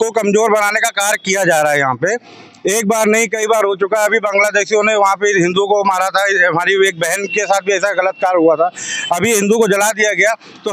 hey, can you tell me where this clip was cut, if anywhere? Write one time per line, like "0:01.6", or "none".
none